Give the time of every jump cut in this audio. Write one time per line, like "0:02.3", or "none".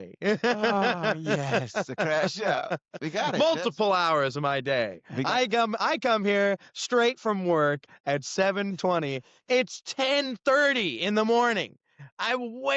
none